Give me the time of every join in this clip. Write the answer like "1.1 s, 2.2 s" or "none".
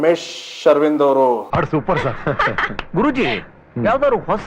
1.5 s